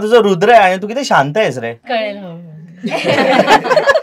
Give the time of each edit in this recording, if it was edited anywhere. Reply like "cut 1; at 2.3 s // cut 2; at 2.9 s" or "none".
cut 1; at 1.8 s